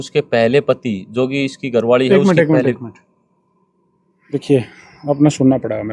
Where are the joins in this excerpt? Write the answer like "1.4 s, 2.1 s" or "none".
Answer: none